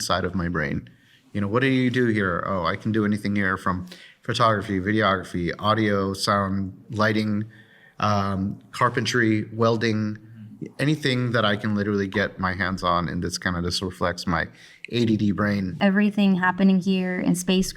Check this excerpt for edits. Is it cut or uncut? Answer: cut